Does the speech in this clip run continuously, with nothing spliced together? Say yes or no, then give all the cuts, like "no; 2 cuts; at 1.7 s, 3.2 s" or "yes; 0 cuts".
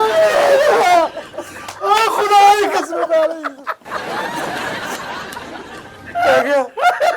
no; 2 cuts; at 4.0 s, 6.0 s